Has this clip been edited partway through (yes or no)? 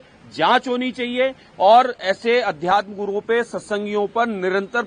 no